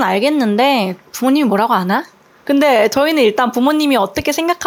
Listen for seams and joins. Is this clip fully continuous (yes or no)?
yes